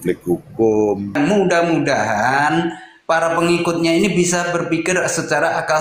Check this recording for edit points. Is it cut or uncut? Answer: cut